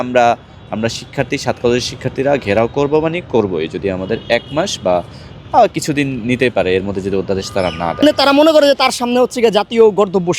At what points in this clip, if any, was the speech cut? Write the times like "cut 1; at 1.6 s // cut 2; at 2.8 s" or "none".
cut 1; at 8.1 s